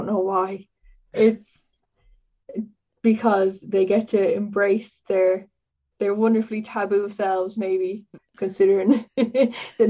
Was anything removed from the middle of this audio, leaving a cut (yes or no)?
yes